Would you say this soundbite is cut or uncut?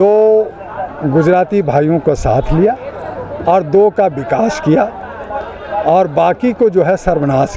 uncut